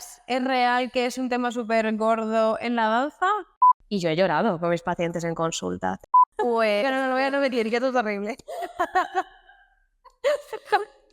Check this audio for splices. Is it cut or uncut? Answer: cut